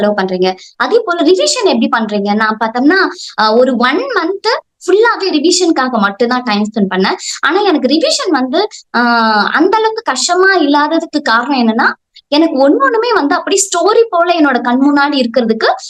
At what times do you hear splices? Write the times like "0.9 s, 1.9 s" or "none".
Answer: none